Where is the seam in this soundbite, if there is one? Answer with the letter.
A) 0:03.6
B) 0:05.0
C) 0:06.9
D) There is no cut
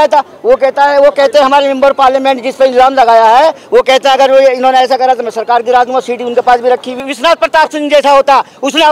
C